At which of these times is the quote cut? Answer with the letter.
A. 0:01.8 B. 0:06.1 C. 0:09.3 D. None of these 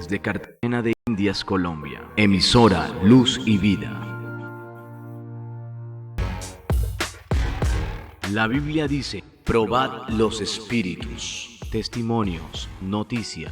B